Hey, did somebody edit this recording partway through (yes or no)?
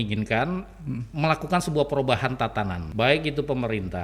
yes